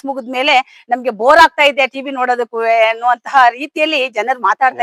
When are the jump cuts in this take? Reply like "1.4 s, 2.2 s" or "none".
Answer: none